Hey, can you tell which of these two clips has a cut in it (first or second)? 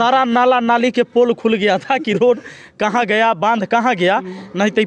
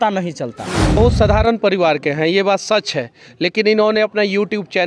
second